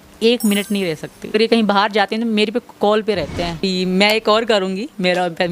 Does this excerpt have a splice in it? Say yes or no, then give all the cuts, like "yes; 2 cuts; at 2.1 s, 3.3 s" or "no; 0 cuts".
yes; 2 cuts; at 1.3 s, 3.6 s